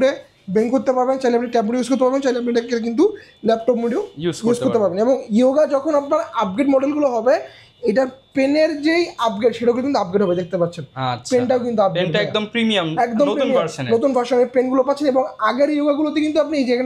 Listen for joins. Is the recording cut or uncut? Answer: uncut